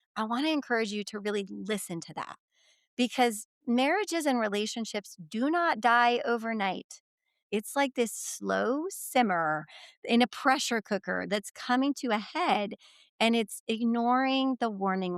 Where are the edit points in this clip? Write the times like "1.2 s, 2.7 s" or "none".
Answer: 7.4 s